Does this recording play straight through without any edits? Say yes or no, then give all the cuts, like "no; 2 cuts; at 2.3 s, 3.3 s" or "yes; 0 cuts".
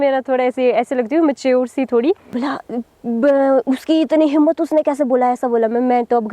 no; 1 cut; at 2.3 s